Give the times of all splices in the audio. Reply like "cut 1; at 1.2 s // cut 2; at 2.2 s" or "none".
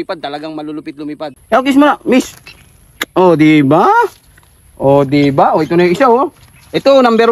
cut 1; at 1.3 s